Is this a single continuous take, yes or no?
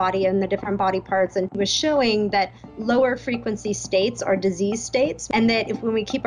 no